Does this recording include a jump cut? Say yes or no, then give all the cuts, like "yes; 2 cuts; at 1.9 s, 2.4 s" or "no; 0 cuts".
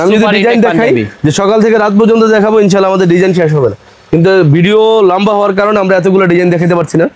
no; 0 cuts